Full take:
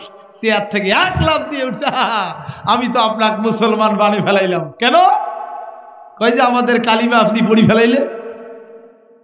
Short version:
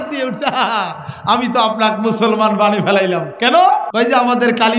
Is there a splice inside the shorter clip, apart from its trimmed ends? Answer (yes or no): yes